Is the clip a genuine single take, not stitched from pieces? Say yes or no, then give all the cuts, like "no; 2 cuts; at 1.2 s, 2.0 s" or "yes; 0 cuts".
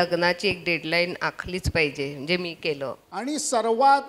no; 1 cut; at 3.1 s